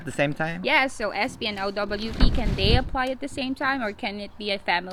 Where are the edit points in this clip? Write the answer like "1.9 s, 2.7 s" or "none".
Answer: none